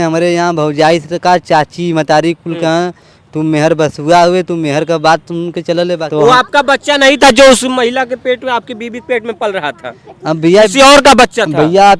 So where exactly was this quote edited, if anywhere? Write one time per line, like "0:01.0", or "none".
0:06.0